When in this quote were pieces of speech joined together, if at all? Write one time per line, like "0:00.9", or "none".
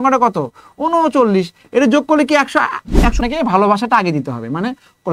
0:03.2